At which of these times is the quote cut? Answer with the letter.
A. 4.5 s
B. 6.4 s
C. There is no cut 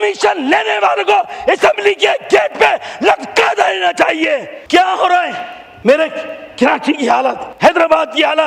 A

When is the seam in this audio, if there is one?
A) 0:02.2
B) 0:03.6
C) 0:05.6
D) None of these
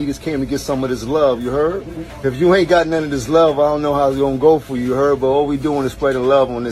D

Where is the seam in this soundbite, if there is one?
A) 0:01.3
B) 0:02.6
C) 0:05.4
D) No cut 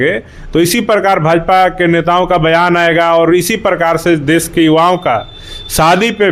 D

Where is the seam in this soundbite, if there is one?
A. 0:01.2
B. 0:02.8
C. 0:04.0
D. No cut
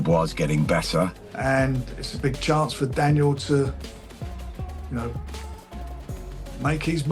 A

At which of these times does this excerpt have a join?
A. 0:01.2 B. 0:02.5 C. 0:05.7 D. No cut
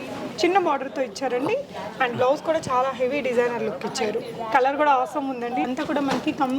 C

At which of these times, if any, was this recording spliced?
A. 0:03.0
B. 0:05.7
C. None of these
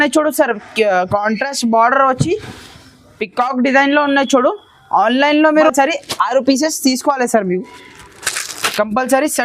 B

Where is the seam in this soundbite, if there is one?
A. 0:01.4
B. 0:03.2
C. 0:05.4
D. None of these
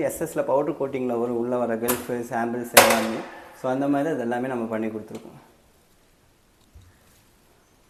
D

